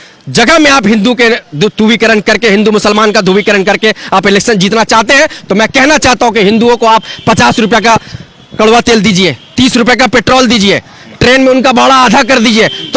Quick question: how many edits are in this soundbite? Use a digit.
0